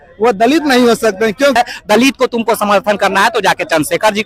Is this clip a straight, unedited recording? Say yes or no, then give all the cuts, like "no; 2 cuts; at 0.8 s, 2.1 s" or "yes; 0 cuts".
no; 1 cut; at 1.6 s